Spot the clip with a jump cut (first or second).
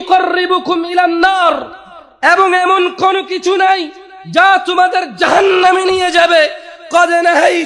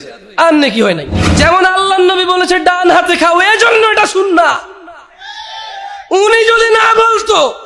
second